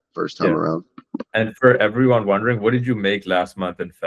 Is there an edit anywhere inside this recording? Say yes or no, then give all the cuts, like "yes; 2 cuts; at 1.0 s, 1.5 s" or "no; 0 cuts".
no; 0 cuts